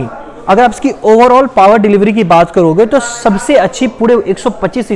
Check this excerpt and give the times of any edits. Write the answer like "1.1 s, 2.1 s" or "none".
none